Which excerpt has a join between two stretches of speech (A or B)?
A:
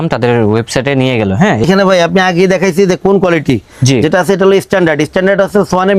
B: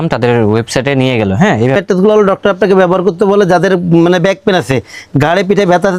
B